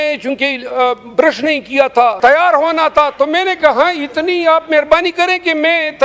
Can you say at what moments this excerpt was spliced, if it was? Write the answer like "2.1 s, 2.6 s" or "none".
2.2 s